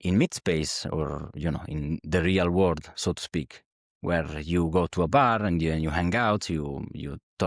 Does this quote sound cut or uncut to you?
uncut